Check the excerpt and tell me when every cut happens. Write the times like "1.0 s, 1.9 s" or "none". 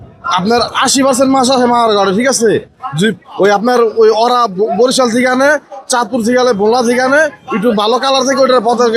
none